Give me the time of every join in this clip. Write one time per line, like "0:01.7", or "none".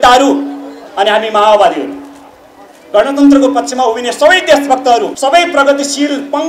0:05.1